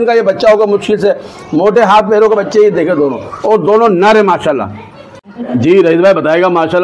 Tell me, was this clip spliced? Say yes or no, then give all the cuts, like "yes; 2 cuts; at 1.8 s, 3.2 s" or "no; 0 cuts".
yes; 1 cut; at 5.5 s